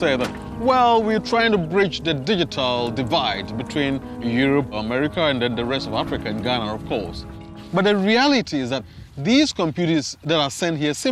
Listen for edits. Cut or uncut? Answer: uncut